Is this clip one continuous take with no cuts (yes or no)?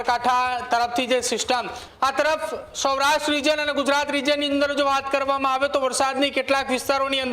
no